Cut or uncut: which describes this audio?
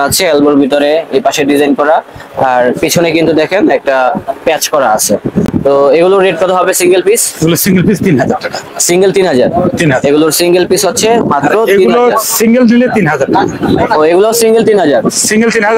uncut